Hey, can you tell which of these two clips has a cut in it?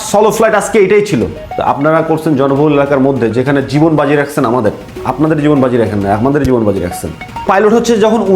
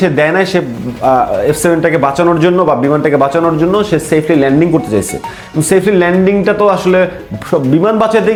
first; 2 cuts; at 1.4 s, 7.3 s

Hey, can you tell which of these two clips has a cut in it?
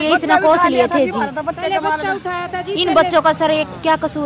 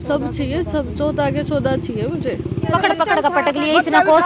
second; 1 cut; at 2.7 s

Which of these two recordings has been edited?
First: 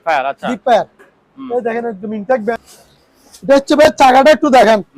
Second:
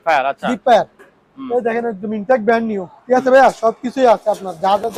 first; 1 cut; at 2.5 s

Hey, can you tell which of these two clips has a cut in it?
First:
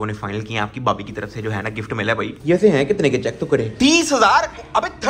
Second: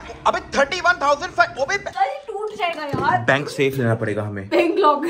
second; 1 cut; at 1.8 s

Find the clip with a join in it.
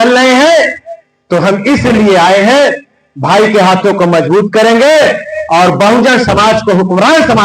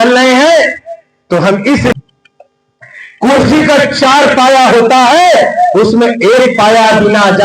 second; 1 cut; at 1.9 s

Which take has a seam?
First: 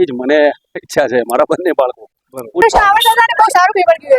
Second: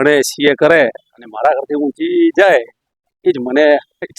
first; 1 cut; at 2.6 s

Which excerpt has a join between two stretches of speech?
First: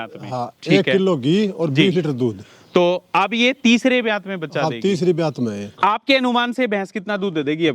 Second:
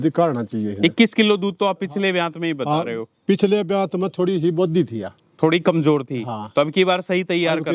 first; 1 cut; at 5.7 s

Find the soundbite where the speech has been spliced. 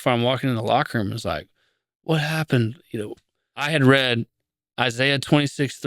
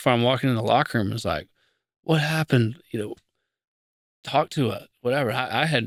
first; 1 cut; at 3.6 s

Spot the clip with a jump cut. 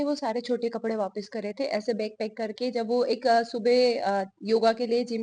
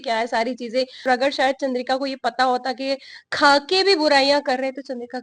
second; 1 cut; at 1.1 s

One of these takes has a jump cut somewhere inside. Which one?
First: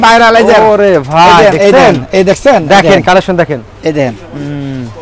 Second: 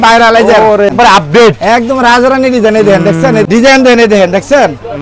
second; 2 cuts; at 0.9 s, 3.5 s

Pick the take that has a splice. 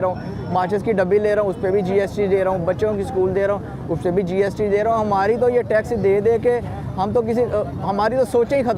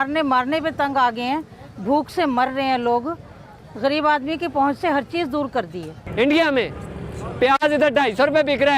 second; 1 cut; at 6.0 s

